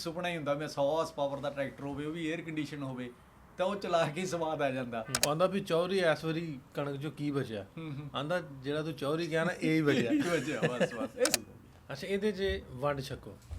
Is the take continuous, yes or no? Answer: no